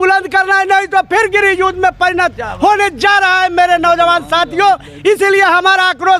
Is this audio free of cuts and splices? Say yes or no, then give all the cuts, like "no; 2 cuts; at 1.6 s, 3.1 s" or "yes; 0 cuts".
yes; 0 cuts